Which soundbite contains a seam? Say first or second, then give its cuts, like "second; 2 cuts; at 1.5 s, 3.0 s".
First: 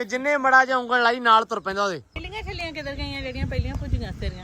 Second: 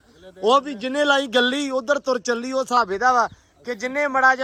first; 1 cut; at 2.2 s